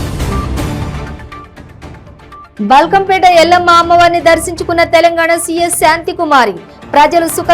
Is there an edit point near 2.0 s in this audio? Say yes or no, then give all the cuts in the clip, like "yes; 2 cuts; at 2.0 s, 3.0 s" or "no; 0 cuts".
yes; 1 cut; at 2.0 s